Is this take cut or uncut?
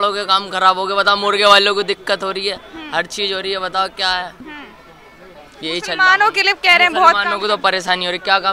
uncut